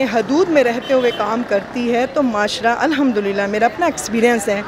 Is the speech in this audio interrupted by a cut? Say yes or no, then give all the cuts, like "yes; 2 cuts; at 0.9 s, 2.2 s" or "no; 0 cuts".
no; 0 cuts